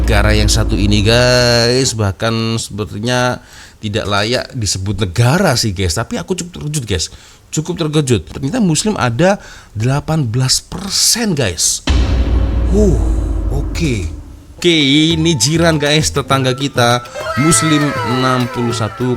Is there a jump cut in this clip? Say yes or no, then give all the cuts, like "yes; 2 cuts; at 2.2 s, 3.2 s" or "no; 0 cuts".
yes; 1 cut; at 14.6 s